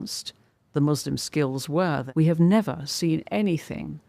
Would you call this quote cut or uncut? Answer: cut